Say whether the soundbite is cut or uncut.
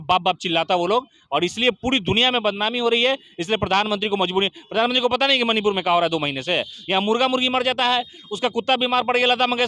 uncut